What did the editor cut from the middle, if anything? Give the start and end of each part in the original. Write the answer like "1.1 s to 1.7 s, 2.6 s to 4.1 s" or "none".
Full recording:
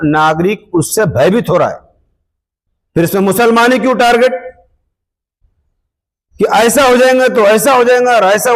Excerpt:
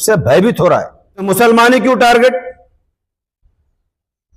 2.1 s to 3.2 s